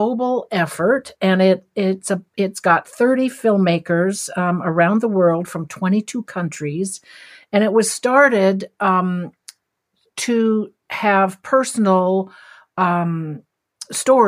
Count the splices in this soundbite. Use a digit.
0